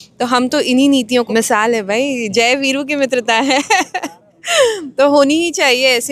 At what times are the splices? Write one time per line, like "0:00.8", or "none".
0:01.3